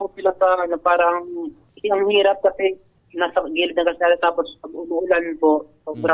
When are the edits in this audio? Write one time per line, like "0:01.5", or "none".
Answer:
none